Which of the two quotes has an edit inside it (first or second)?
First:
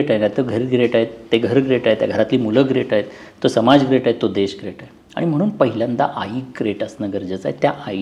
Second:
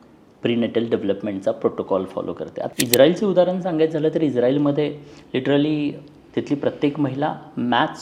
second